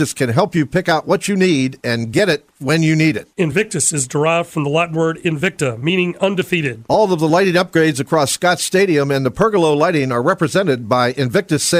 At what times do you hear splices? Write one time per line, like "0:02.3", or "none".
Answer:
none

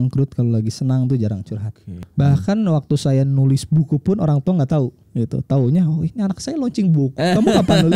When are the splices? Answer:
0:02.0
0:05.0

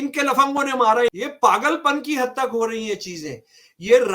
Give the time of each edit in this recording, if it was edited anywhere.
0:01.2

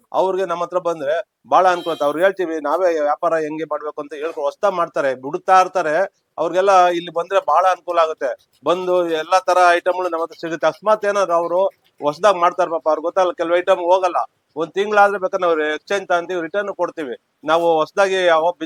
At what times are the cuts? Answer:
none

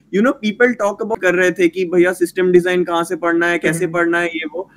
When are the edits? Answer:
0:01.2

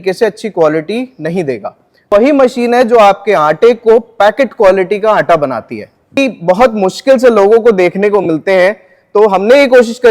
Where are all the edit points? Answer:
0:02.1
0:06.2

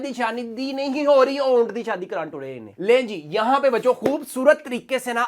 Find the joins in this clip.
0:02.7

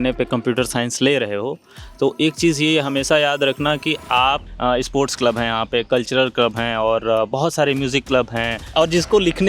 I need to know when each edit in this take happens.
0:04.5
0:08.7

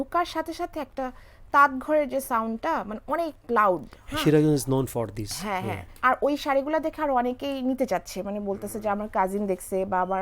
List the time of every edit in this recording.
0:05.9

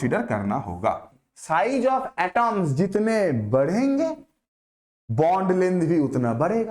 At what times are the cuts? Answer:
0:01.3

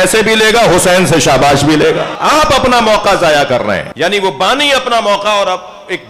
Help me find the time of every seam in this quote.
0:02.1
0:03.9

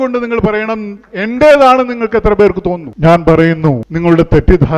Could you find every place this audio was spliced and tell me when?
0:02.9
0:03.9

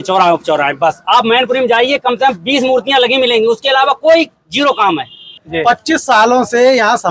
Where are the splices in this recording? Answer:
0:05.4

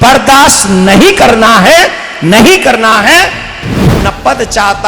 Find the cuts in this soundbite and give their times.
0:03.9

